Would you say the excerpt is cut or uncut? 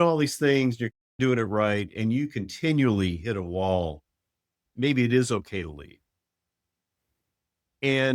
uncut